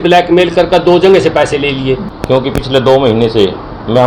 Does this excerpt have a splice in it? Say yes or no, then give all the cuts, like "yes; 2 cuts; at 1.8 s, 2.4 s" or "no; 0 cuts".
yes; 1 cut; at 2.4 s